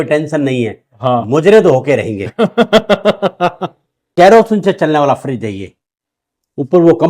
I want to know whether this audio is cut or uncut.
cut